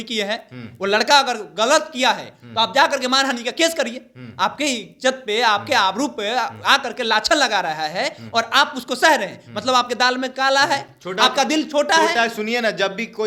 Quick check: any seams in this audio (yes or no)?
no